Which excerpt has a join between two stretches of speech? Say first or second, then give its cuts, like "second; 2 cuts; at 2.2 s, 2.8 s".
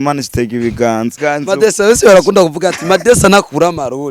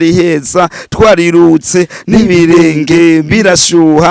first; 1 cut; at 1.2 s